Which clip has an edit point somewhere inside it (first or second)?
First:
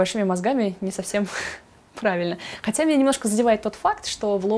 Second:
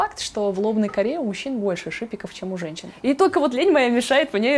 second